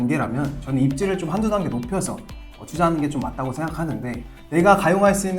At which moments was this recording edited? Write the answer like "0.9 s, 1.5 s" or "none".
4.3 s